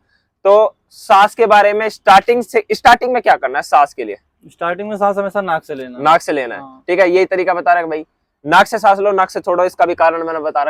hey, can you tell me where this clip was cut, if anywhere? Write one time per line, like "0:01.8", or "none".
none